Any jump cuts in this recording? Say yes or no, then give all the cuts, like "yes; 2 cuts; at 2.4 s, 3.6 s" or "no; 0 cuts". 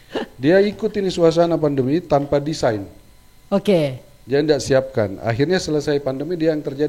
no; 0 cuts